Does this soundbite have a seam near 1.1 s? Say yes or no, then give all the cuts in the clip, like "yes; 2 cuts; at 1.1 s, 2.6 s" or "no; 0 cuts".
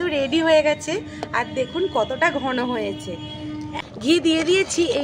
no; 1 cut; at 3.7 s